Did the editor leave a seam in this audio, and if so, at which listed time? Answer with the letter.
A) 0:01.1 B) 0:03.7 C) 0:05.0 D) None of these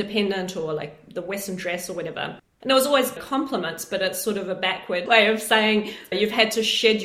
C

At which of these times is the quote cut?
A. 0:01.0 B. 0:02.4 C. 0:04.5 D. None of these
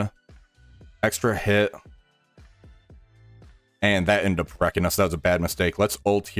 B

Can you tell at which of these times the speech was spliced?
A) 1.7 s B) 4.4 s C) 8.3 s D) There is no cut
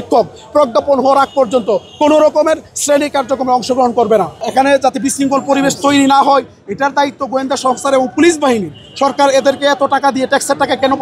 B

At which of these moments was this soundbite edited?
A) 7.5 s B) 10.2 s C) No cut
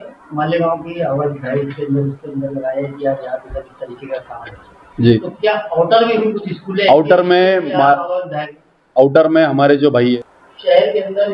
B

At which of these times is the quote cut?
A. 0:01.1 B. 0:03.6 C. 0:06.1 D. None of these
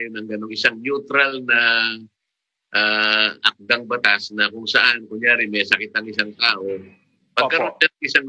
D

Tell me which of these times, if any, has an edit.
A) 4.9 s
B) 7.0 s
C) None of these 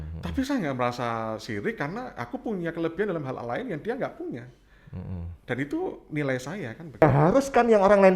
B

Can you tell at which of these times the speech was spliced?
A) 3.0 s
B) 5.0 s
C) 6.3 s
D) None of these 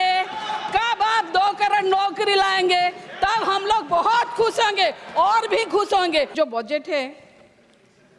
C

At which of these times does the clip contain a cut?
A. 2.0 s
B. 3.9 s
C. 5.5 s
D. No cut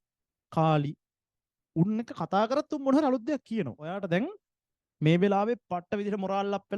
B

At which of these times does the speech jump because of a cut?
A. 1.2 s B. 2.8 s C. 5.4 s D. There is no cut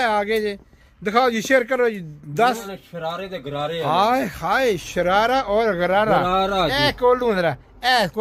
B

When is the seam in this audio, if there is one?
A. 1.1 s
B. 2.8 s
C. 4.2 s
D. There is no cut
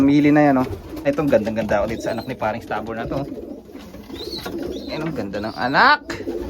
A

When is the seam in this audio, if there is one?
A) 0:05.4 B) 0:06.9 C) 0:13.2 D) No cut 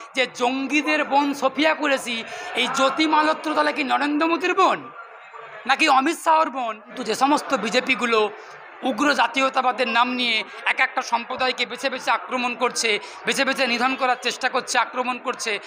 B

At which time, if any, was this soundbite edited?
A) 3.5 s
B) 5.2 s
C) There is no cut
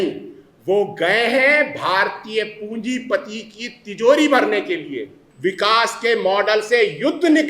B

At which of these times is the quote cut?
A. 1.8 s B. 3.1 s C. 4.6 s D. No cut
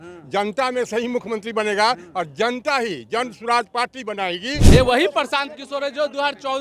C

